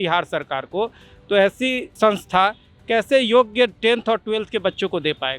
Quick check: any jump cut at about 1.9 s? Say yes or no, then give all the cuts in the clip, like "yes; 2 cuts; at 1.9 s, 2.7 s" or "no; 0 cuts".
yes; 1 cut; at 1.9 s